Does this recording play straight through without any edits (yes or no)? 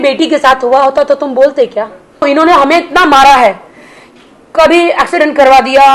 no